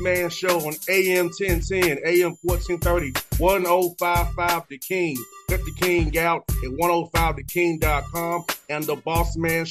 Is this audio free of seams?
yes; 0 cuts

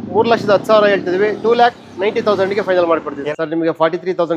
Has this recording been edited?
yes; 1 cut; at 3.1 s

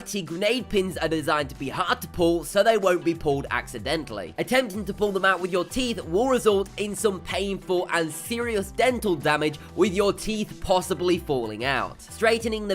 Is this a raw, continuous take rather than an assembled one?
no; 1 cut; at 3.5 s

